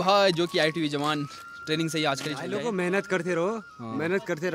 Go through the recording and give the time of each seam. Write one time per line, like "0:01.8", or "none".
0:02.5